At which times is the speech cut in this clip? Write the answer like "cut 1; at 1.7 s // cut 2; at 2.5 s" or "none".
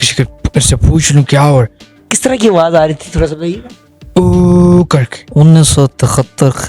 cut 1; at 2.1 s // cut 2; at 5.2 s